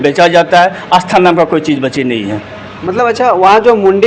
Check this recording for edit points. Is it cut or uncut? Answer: uncut